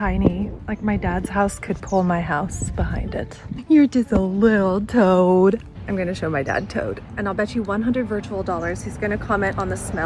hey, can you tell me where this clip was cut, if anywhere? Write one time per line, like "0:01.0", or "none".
none